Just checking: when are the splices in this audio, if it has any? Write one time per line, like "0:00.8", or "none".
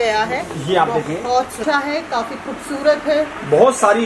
0:01.6